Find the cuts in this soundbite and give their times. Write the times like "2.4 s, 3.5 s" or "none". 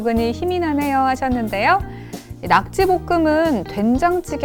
none